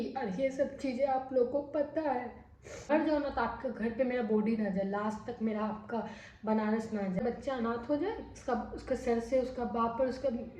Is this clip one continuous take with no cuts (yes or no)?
no